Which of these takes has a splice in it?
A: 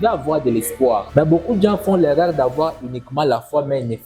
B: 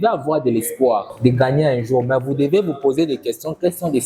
A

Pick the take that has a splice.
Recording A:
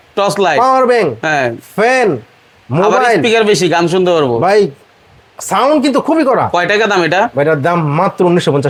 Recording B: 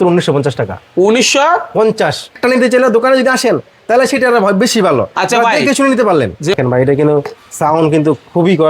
B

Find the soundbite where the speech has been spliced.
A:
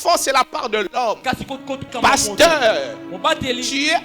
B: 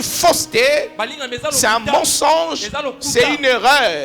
A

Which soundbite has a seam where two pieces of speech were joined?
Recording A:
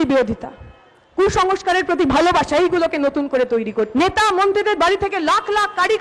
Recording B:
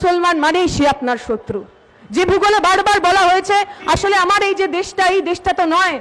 A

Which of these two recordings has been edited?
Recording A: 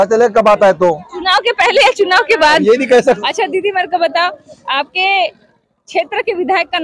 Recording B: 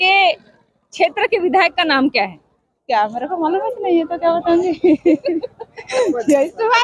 A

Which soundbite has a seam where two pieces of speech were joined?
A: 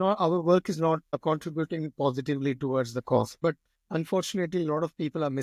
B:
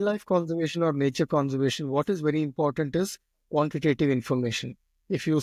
A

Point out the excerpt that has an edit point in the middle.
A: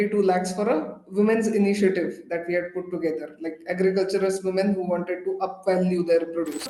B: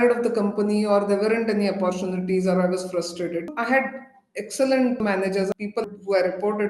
B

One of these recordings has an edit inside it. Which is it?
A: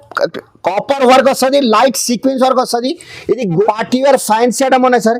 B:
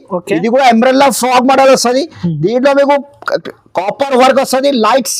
A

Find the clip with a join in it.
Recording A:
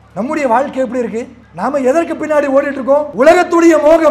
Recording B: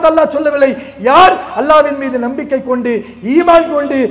A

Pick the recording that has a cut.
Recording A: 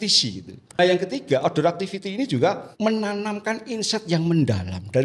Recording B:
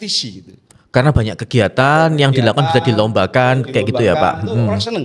A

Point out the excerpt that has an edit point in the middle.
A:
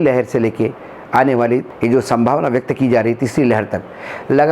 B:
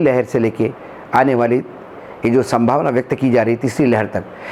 A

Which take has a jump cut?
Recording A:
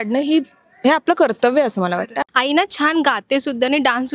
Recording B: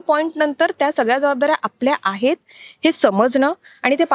A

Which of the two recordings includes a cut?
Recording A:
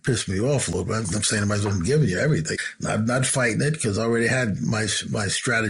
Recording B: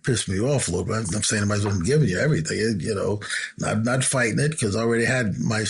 A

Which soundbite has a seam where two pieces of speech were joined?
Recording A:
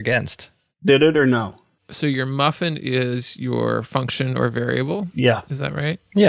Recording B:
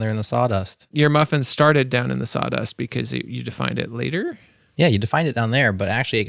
A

